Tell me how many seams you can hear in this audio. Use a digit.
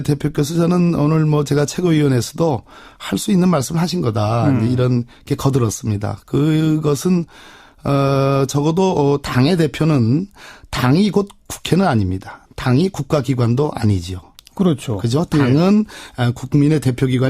1